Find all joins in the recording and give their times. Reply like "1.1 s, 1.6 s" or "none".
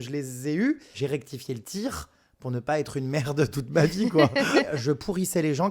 0.9 s, 4.7 s